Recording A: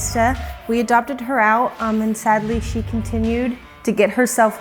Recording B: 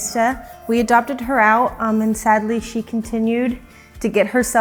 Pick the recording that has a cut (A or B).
A